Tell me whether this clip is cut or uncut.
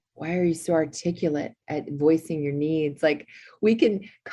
cut